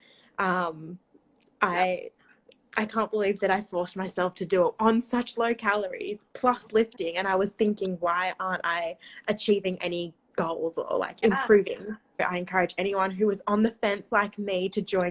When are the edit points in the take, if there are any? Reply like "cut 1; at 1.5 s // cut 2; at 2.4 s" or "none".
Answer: cut 1; at 12.2 s